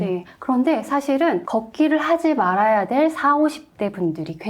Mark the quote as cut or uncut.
cut